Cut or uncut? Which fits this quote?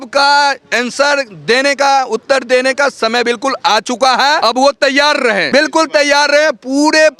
cut